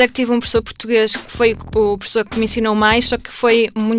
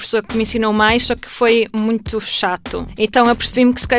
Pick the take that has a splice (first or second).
second